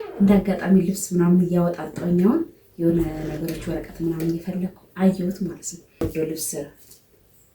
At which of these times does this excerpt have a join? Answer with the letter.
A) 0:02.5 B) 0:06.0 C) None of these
B